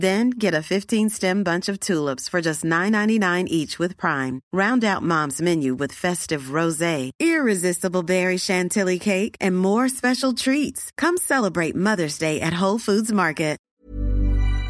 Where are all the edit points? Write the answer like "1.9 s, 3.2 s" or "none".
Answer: 13.6 s